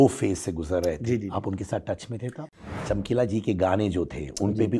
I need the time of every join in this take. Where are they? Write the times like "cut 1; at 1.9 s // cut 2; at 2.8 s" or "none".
cut 1; at 2.6 s